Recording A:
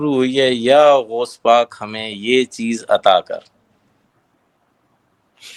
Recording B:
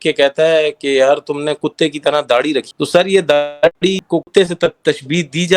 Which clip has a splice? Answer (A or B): B